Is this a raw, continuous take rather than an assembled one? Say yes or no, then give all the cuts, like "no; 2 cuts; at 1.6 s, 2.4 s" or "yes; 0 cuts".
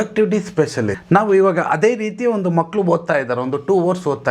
no; 1 cut; at 1.0 s